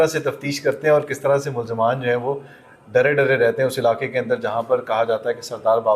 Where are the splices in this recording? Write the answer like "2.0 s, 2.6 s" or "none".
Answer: none

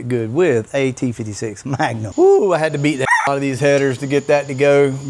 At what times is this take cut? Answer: 2.1 s

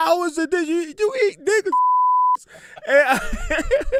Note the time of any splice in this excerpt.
none

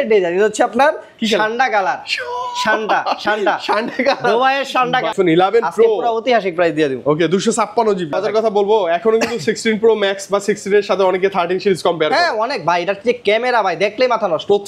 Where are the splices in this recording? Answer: 5.1 s, 8.1 s

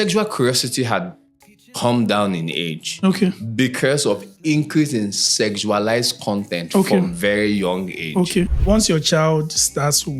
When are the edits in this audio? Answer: 8.6 s

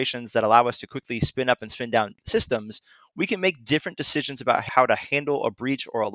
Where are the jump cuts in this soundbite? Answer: 2.2 s, 4.6 s

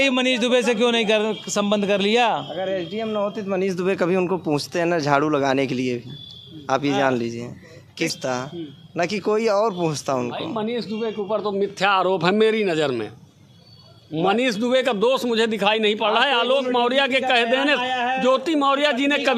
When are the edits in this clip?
8.1 s

